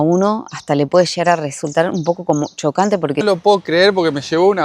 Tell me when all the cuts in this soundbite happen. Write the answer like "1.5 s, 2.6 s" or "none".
3.2 s